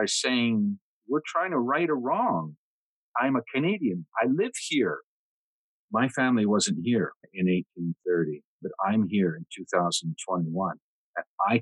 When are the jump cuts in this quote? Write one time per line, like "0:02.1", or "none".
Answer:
0:00.9
0:02.9
0:05.5
0:07.3
0:08.6